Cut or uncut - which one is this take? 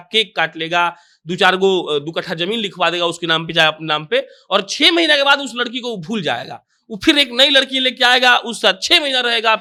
uncut